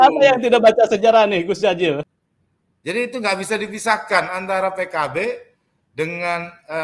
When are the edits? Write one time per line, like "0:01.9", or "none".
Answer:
0:02.0

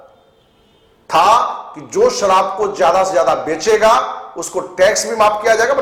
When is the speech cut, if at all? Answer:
none

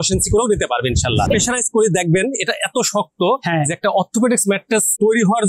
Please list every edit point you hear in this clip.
0:01.3

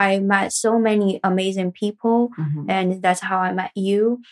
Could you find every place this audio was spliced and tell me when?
none

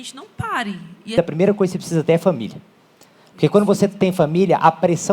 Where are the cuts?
0:01.1

